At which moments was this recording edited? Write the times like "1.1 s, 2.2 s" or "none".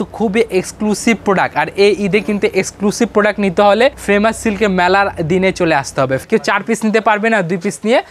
4.0 s, 6.2 s